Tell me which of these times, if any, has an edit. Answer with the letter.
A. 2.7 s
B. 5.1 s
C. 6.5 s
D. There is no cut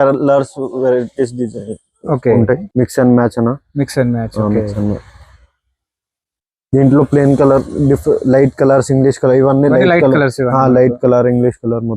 A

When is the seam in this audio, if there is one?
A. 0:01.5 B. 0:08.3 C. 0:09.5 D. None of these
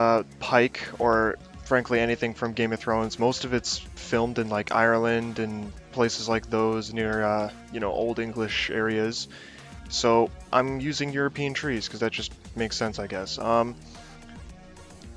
C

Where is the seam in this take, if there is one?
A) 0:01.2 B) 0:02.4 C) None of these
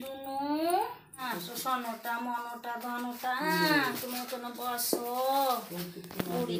A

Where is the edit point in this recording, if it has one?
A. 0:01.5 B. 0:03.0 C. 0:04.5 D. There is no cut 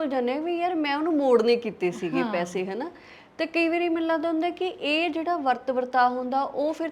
D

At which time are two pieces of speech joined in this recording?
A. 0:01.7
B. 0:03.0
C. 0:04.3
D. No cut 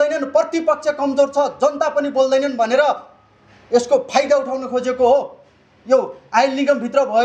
D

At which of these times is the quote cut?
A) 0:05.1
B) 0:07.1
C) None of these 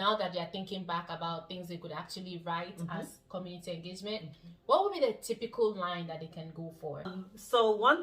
B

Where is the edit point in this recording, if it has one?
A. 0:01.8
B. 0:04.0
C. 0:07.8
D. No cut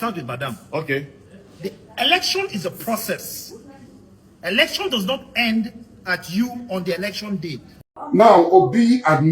C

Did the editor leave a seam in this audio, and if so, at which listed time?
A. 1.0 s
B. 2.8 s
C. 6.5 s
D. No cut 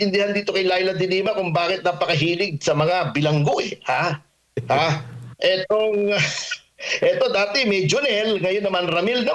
D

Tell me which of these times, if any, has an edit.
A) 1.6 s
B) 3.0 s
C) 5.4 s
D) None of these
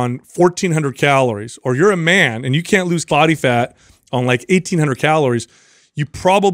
B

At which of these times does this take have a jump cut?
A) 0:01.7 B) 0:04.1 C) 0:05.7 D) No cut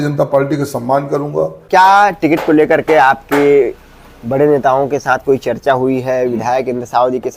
A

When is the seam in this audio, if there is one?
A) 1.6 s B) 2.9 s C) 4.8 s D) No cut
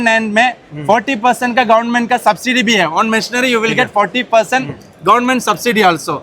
D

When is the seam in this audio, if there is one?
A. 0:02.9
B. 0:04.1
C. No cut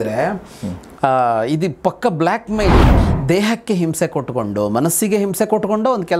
A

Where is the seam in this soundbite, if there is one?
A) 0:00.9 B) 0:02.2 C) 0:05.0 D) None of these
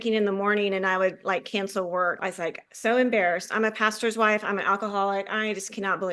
B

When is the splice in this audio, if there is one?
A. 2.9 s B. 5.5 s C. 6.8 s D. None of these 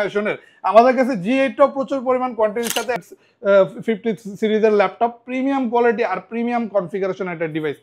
A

